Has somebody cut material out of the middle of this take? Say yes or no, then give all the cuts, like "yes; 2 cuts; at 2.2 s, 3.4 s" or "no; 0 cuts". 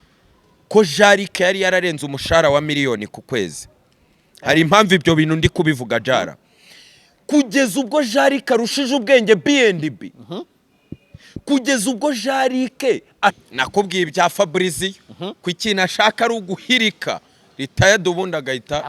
yes; 1 cut; at 13.4 s